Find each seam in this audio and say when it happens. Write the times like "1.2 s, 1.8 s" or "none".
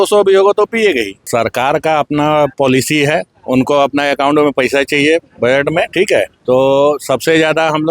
1.2 s, 3.3 s, 6.4 s